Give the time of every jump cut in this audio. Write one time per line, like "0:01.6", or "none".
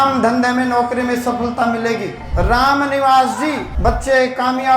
0:02.2
0:03.7